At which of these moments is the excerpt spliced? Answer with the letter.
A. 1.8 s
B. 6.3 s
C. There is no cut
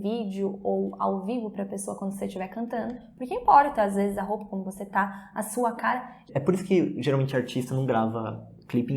B